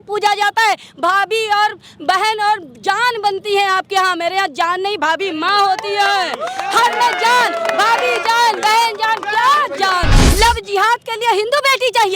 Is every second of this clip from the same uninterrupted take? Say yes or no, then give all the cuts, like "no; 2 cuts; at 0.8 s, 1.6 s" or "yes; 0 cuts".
no; 1 cut; at 10.2 s